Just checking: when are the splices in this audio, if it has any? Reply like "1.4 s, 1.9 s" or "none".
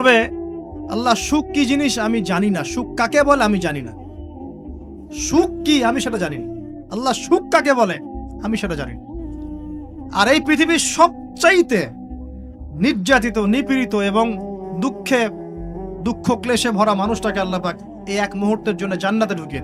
8.9 s, 10.1 s